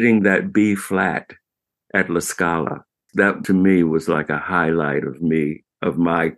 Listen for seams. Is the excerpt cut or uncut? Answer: cut